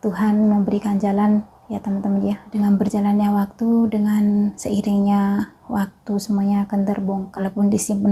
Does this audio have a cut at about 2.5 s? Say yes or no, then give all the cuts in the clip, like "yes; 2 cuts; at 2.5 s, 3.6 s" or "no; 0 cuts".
yes; 2 cuts; at 2.5 s, 7.3 s